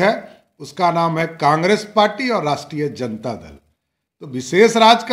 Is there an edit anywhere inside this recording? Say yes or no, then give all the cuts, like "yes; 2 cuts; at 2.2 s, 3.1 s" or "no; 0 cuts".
no; 0 cuts